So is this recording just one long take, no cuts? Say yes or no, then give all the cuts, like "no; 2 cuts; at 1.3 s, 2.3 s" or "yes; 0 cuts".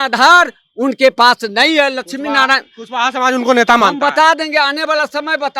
yes; 0 cuts